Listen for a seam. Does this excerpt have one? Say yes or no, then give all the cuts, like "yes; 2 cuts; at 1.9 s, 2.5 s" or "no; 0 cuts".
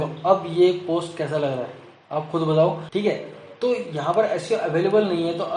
yes; 1 cut; at 2.8 s